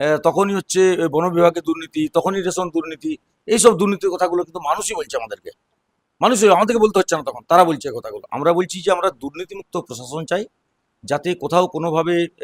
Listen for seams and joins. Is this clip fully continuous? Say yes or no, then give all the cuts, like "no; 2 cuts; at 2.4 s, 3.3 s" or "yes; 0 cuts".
yes; 0 cuts